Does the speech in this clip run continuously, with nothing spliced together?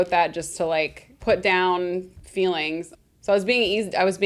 no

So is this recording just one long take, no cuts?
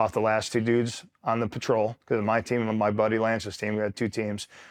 yes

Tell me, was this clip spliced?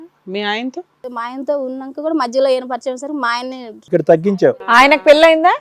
yes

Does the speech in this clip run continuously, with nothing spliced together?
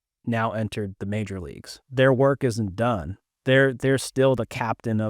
no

